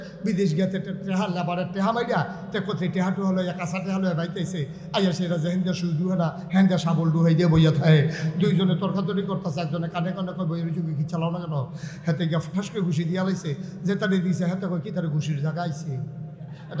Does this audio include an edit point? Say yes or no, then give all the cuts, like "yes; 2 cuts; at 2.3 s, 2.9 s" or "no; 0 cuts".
no; 0 cuts